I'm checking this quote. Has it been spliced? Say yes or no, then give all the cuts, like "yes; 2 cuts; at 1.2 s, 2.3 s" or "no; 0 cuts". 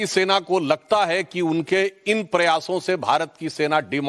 yes; 1 cut; at 1.3 s